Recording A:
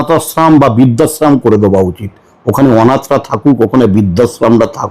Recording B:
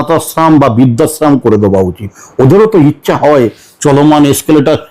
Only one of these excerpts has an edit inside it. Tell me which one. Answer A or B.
B